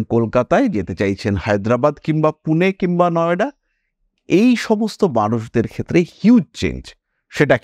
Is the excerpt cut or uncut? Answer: uncut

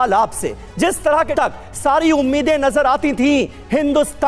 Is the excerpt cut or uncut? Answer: cut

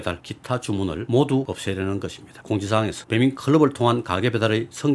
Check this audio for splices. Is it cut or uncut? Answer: uncut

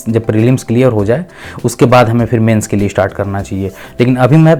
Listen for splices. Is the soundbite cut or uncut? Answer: uncut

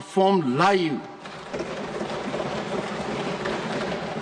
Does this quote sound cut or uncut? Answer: uncut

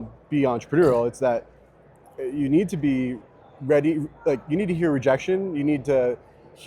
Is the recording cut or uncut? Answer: uncut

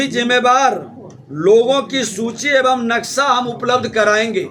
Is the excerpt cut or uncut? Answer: uncut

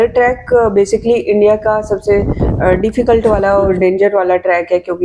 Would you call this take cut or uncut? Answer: uncut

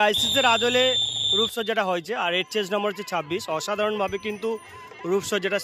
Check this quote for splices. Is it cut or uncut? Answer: uncut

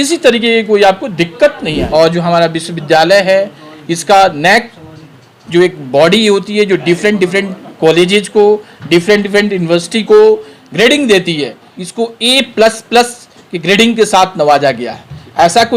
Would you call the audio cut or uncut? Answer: cut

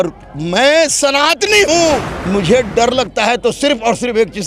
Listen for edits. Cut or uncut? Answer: cut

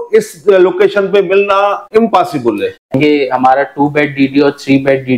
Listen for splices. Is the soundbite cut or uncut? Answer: cut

